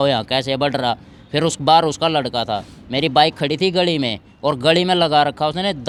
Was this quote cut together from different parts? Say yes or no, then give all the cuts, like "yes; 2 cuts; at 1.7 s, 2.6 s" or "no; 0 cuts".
no; 0 cuts